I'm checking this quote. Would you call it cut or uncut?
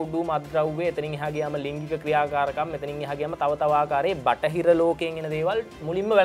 uncut